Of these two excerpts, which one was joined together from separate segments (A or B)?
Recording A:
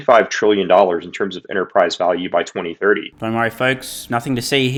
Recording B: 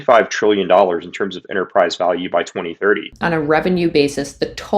B